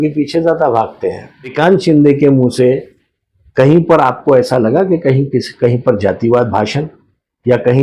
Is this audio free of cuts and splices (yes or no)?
no